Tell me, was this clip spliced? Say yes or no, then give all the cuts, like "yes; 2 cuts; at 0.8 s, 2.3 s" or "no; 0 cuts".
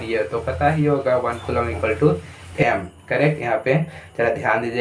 yes; 1 cut; at 2.5 s